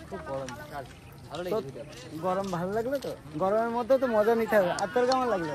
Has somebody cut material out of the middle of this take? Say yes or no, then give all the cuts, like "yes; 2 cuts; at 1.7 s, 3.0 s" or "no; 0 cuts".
no; 0 cuts